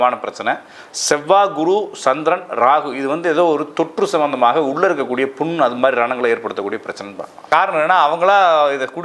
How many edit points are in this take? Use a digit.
1